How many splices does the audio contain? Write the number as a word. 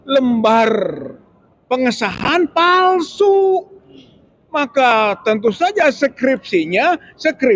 zero